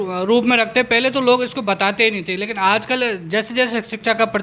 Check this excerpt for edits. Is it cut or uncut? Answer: uncut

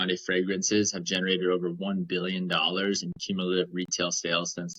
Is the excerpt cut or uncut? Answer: uncut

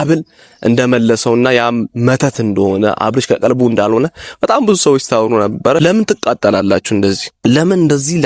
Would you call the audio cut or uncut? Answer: cut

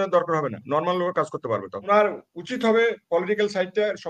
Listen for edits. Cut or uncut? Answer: cut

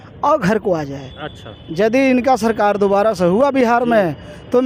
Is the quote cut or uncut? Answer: uncut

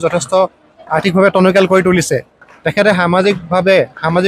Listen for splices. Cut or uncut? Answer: uncut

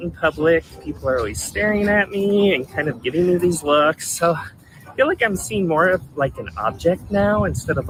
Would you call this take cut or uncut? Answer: uncut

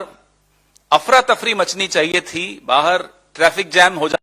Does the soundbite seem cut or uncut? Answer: uncut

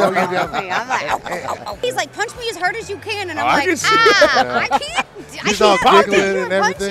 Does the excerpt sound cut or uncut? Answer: cut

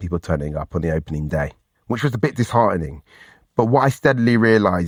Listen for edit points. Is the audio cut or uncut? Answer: uncut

